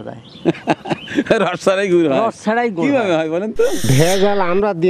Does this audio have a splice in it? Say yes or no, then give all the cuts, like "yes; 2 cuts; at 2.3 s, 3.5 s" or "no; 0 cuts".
yes; 1 cut; at 3.9 s